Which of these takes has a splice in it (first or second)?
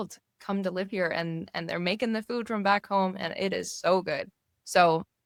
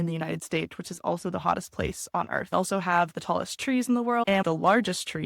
second